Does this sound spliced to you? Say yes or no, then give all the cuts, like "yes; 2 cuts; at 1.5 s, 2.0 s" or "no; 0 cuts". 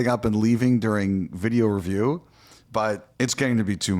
yes; 1 cut; at 3.1 s